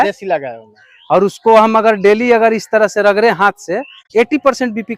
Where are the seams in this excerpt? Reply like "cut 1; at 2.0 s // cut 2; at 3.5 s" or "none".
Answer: cut 1; at 4.0 s